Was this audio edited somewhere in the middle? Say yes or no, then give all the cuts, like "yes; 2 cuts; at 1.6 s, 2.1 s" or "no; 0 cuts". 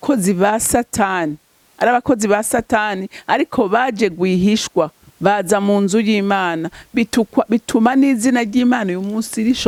no; 0 cuts